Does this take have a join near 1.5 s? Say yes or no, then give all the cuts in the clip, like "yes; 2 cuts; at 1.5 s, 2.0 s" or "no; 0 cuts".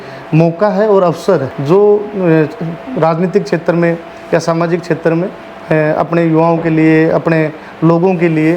yes; 1 cut; at 1.5 s